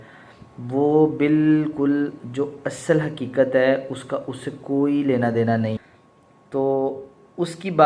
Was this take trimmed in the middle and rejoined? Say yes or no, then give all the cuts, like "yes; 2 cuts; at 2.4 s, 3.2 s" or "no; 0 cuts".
yes; 1 cut; at 5.8 s